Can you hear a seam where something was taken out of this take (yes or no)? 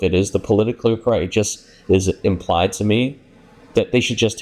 no